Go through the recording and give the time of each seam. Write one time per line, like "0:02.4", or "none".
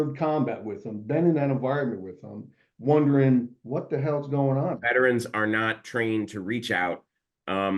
0:04.8